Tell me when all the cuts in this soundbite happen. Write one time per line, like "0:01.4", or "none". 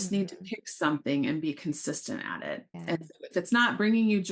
0:02.6